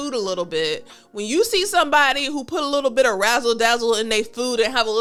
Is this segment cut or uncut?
uncut